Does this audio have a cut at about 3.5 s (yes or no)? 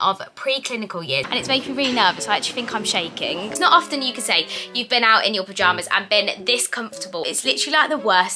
yes